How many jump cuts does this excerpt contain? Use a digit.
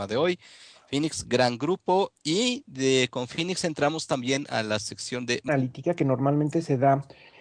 0